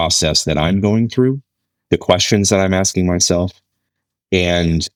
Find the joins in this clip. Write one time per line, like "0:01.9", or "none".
none